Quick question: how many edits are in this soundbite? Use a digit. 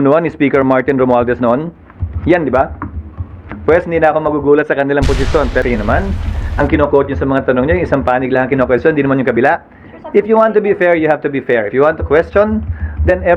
1